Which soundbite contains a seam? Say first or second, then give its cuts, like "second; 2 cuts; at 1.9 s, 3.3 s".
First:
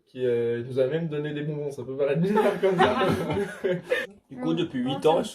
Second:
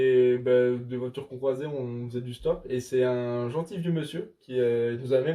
first; 1 cut; at 4.1 s